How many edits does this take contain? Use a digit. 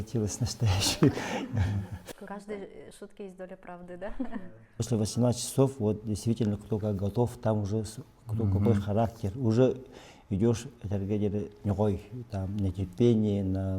1